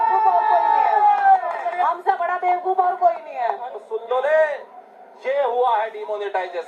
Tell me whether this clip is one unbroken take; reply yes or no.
no